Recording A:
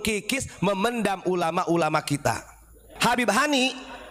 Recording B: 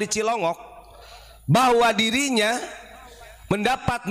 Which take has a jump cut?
A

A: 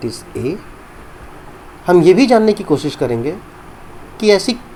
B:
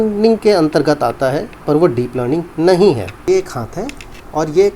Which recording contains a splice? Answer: B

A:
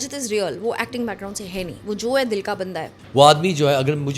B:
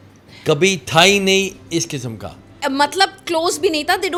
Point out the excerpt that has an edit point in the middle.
A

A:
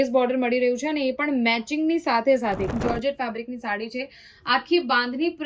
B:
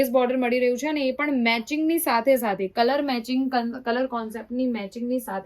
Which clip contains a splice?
A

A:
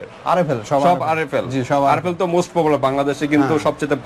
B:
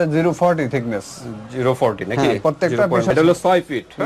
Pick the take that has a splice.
B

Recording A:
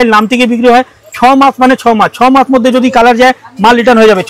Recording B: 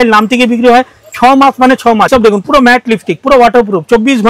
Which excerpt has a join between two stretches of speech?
B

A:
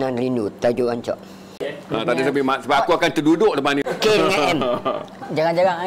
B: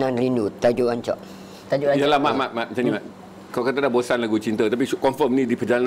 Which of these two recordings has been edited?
A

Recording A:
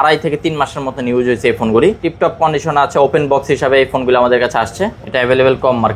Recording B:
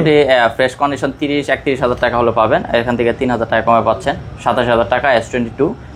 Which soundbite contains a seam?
A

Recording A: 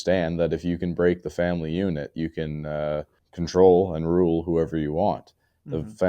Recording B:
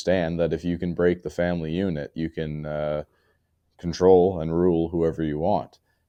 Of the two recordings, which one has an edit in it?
A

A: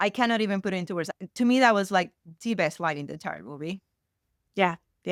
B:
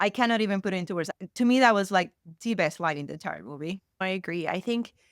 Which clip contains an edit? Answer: B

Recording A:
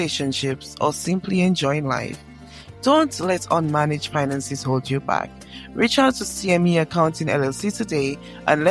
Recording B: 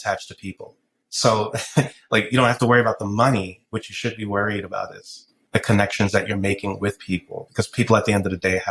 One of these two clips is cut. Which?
B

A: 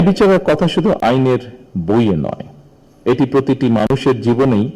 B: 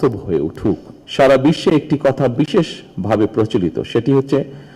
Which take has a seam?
B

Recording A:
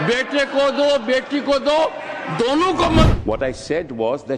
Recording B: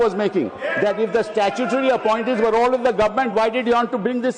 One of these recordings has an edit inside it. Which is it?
A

